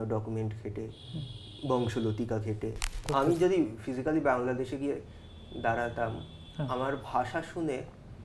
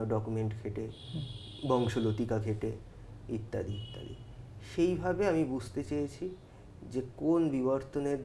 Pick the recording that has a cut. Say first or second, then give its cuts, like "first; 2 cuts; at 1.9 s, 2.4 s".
first; 1 cut; at 3.0 s